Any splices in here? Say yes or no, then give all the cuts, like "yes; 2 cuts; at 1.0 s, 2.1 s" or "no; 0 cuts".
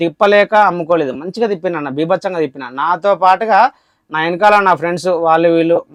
no; 0 cuts